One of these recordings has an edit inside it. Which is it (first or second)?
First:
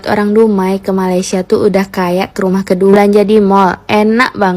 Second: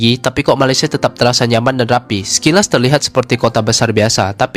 first